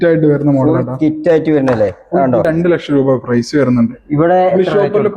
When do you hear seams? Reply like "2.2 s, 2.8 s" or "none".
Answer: 2.5 s